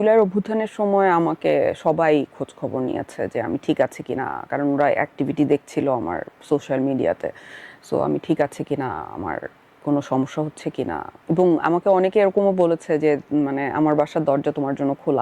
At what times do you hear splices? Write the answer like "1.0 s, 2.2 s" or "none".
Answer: none